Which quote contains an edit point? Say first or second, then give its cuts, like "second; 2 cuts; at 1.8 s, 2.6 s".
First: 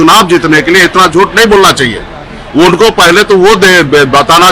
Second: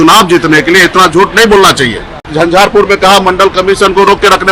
second; 1 cut; at 2.3 s